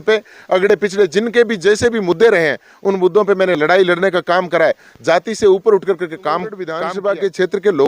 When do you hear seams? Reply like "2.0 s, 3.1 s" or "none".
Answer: 6.8 s